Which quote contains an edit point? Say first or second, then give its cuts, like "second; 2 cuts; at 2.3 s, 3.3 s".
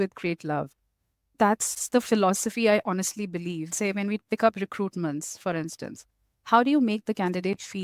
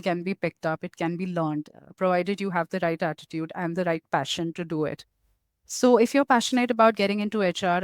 first; 2 cuts; at 1.4 s, 3.7 s